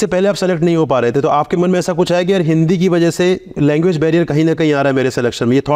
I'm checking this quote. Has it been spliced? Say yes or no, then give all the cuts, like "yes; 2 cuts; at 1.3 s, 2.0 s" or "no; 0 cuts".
no; 0 cuts